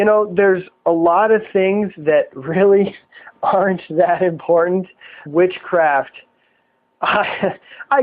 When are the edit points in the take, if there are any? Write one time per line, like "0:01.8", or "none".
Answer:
none